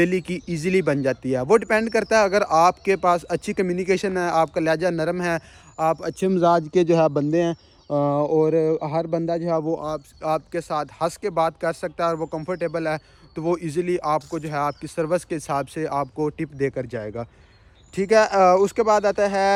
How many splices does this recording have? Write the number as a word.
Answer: zero